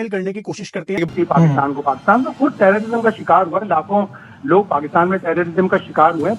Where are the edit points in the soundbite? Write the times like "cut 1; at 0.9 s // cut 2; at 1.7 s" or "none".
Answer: cut 1; at 1.1 s

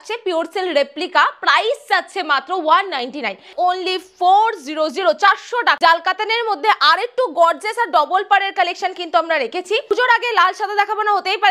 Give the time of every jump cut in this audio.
cut 1; at 3.5 s // cut 2; at 5.8 s // cut 3; at 9.9 s

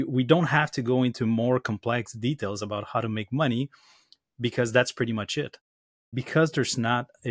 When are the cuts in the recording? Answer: cut 1; at 5.6 s

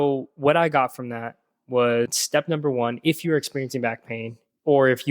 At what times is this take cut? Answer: cut 1; at 2.2 s

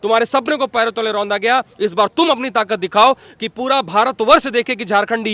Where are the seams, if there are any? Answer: none

